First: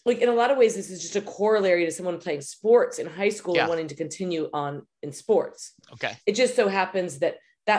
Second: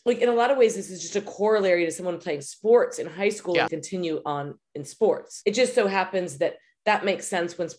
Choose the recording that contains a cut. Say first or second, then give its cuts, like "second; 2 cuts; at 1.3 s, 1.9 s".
second; 2 cuts; at 3.7 s, 5.3 s